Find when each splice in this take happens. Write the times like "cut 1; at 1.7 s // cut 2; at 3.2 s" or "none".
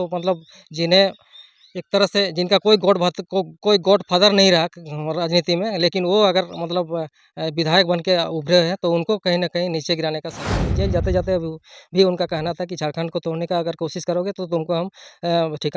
cut 1; at 10.7 s